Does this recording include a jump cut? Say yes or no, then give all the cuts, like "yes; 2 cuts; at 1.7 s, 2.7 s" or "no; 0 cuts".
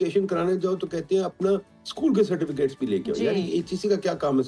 no; 0 cuts